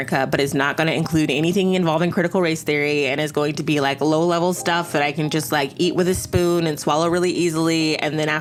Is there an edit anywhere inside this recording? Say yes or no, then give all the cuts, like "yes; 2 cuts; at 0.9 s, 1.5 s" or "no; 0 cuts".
no; 0 cuts